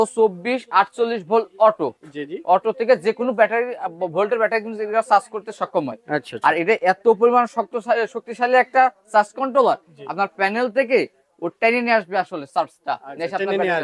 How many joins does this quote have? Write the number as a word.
zero